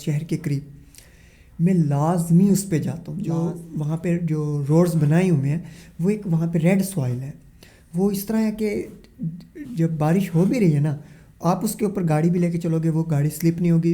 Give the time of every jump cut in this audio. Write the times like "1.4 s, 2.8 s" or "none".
3.1 s